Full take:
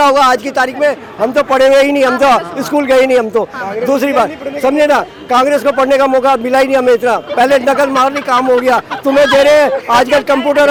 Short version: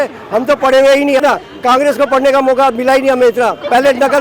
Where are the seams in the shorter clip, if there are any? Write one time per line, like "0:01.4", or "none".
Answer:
0:01.2